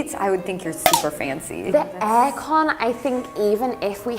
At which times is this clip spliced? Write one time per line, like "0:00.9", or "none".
0:01.7